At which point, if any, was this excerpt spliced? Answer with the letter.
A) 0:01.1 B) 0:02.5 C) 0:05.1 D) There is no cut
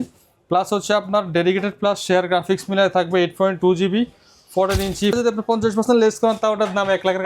C